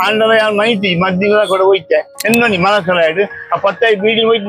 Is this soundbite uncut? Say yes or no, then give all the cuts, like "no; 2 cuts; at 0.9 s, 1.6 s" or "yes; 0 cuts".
no; 1 cut; at 2.2 s